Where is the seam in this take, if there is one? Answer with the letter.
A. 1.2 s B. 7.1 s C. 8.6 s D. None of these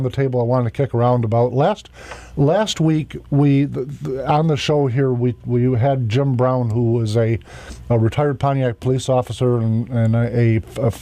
C